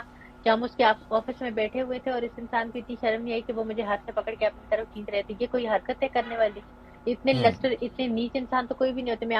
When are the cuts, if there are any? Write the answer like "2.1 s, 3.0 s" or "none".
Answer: none

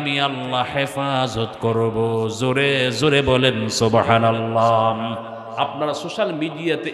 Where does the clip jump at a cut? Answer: 5.4 s

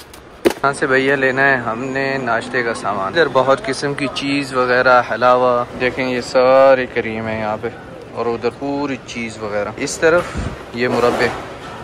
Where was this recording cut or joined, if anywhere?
none

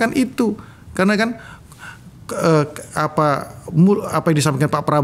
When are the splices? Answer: none

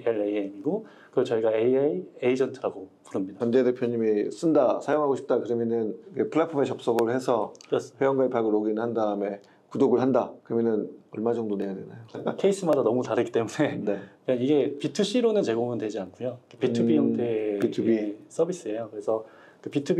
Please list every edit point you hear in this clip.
3.4 s

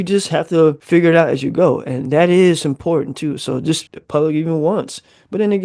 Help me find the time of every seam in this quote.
0.8 s, 3.8 s

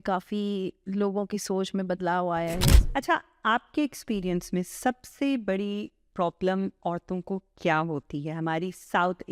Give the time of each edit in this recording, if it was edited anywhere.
2.8 s

